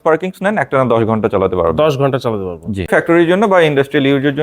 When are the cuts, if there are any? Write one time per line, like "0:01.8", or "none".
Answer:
0:02.9